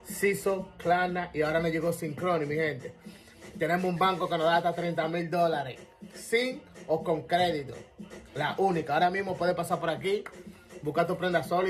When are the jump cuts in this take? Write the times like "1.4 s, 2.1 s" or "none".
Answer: none